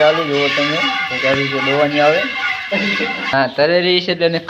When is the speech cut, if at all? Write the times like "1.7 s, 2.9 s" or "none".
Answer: 3.3 s